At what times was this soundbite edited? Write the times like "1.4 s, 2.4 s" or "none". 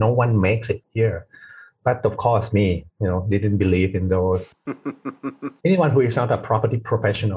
0.9 s, 5.5 s